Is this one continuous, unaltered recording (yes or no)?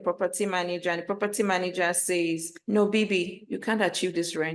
yes